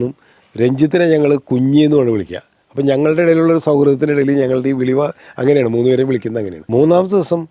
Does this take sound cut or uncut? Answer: cut